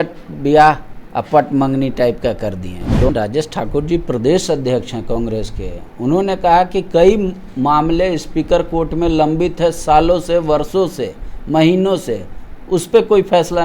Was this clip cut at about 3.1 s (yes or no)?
yes